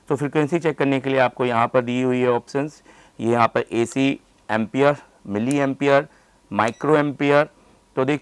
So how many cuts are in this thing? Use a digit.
0